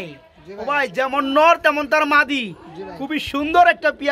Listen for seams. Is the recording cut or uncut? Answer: uncut